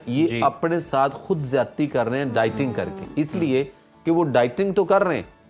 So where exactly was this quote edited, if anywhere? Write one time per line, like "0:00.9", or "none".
none